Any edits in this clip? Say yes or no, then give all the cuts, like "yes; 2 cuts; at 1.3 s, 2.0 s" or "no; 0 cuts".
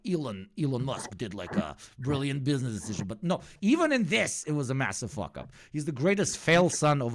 yes; 1 cut; at 3.5 s